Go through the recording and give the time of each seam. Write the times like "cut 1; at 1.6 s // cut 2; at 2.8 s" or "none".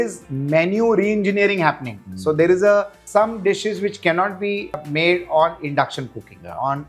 cut 1; at 3.0 s // cut 2; at 4.8 s